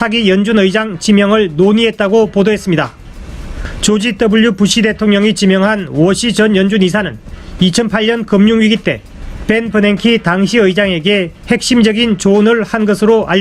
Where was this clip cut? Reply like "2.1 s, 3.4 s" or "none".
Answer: 6.6 s